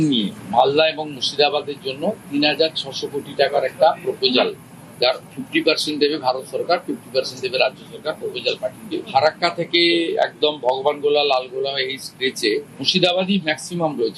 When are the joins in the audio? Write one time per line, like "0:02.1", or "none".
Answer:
0:08.8

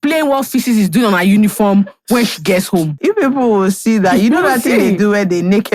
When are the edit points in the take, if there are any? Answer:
0:02.9

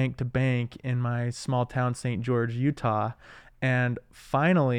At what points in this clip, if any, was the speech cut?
none

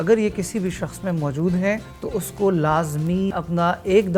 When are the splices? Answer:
0:01.9
0:03.3

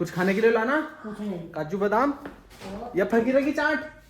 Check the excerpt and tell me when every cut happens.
none

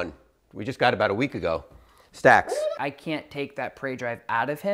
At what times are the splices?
0:02.8

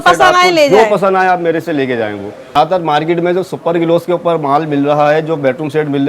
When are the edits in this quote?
0:02.5

